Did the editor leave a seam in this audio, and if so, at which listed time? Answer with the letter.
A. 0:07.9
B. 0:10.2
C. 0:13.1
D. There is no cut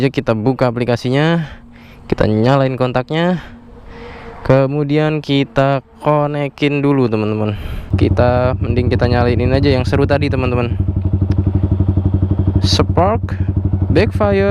A